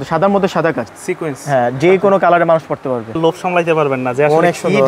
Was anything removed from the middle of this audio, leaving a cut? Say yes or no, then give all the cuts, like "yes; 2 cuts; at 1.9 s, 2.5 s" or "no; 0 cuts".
yes; 2 cuts; at 0.9 s, 3.2 s